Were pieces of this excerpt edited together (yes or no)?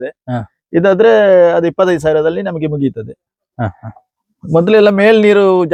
no